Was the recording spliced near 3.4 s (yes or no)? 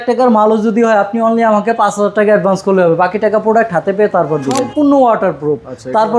no